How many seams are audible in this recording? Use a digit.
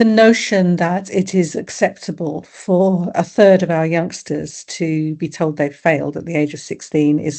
0